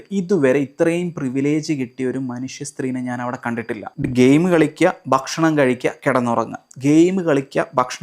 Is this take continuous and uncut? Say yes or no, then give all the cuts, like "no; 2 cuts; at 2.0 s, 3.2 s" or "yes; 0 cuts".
yes; 0 cuts